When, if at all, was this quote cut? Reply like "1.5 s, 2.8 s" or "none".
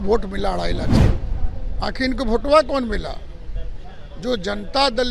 0.9 s